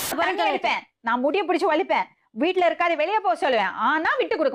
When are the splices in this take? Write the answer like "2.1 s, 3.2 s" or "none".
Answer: none